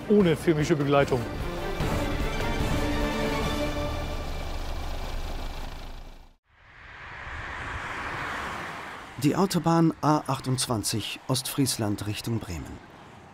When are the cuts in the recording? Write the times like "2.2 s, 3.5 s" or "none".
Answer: 1.0 s